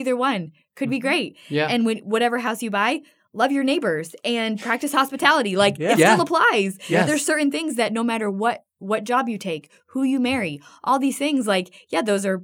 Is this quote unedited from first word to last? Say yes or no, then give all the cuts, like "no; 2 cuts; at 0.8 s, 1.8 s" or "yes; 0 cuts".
yes; 0 cuts